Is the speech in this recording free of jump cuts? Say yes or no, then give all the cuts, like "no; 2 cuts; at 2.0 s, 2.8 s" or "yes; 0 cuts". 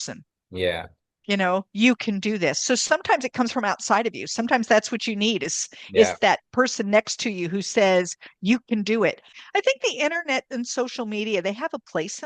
no; 1 cut; at 9.3 s